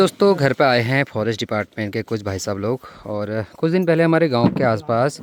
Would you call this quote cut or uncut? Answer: uncut